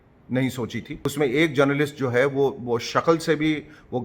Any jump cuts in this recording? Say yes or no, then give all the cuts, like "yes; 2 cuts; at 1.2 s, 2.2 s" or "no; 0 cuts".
yes; 1 cut; at 1.0 s